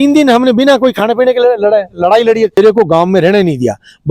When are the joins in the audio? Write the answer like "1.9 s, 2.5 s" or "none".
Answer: 2.6 s

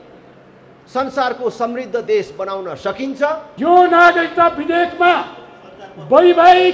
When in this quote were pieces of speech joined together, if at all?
3.5 s

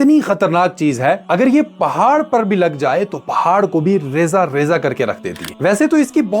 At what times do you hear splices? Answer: 5.5 s

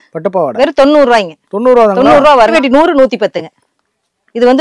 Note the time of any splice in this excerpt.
2.5 s

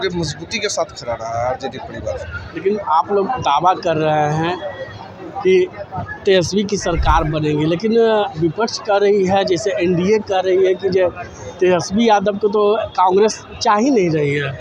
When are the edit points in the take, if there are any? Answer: none

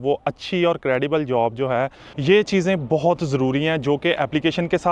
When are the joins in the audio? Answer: 2.1 s

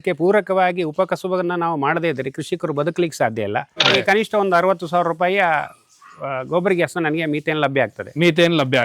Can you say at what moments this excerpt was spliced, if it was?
4.0 s

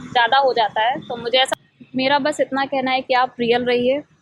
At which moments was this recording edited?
1.5 s

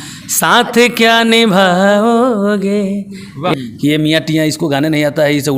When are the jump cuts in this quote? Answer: 3.6 s

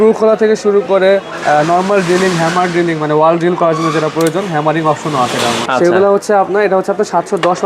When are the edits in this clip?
5.6 s

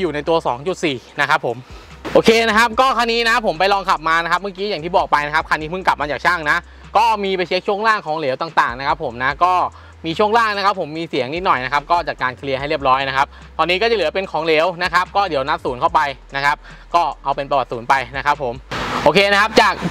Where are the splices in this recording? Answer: 2.0 s

